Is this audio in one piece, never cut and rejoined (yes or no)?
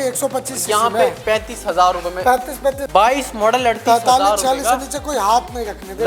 no